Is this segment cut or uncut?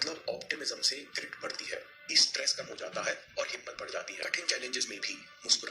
cut